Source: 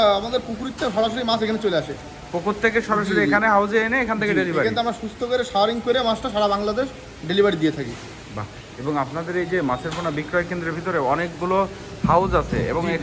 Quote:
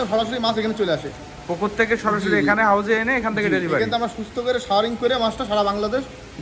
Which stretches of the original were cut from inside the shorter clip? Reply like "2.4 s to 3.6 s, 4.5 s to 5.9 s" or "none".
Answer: none